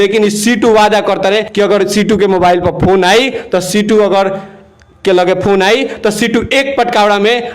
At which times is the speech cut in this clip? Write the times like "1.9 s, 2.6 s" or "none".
1.5 s